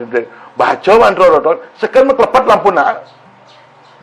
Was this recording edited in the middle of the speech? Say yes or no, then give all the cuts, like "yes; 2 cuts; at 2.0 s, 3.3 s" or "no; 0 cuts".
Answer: no; 0 cuts